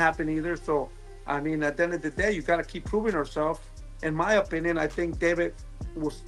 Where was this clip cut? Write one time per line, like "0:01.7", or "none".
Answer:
none